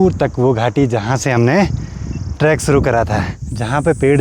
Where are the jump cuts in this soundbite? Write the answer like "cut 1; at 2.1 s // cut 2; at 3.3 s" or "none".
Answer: none